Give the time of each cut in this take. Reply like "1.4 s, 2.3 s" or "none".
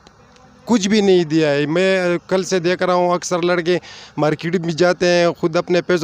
none